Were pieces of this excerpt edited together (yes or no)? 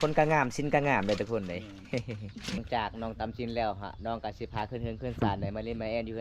yes